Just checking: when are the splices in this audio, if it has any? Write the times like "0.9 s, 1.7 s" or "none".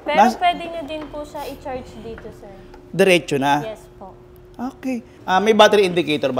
5.1 s